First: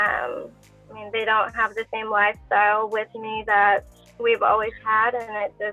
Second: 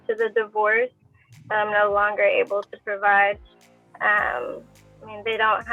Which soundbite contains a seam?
second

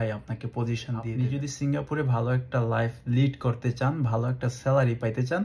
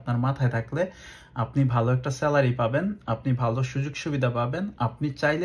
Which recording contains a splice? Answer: first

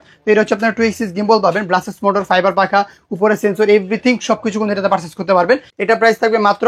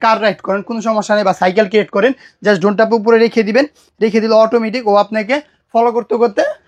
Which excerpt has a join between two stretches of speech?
first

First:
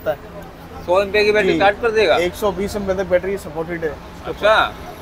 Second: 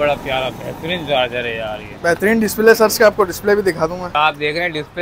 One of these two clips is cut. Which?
second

